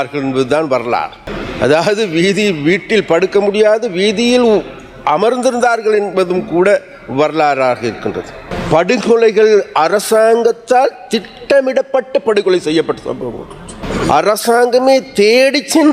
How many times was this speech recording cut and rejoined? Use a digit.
2